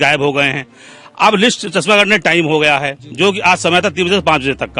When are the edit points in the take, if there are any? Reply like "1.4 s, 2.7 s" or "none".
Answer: none